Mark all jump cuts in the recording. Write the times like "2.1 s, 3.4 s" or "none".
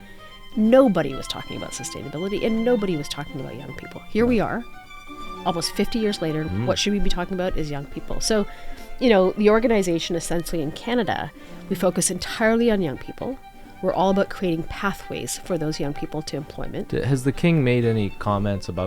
6.5 s, 16.9 s

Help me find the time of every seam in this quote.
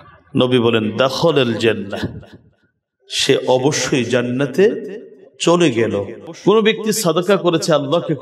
6.2 s

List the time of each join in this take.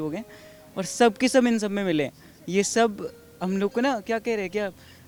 none

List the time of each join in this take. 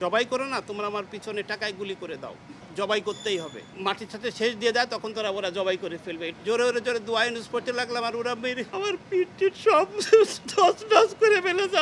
2.6 s, 3.7 s, 6.3 s, 8.7 s

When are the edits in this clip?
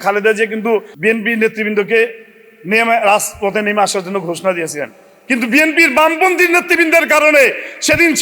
0.9 s

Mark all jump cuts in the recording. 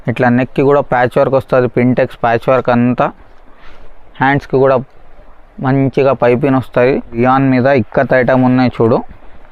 7.2 s

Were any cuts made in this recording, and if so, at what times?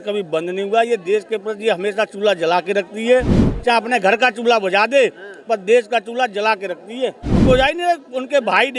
7.4 s

